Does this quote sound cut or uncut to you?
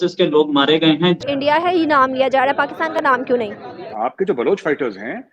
cut